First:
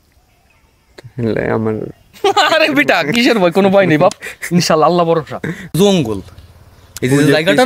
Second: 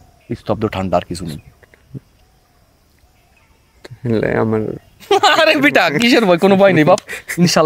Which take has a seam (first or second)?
first